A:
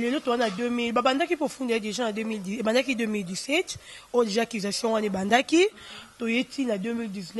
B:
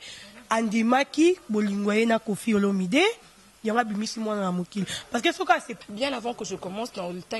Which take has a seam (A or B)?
B